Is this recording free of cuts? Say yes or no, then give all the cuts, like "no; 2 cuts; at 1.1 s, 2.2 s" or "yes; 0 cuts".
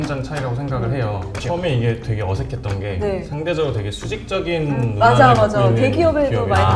no; 1 cut; at 1.3 s